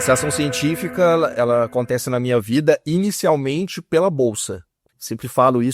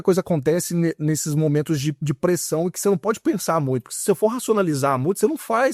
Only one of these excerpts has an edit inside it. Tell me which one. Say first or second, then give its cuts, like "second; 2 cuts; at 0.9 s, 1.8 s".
first; 2 cuts; at 1.3 s, 4.9 s